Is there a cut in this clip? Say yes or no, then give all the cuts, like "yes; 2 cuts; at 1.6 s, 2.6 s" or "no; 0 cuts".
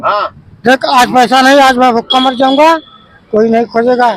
no; 0 cuts